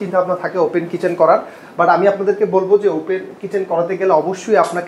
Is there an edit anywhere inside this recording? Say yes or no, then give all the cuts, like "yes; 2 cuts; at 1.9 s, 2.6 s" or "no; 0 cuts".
no; 0 cuts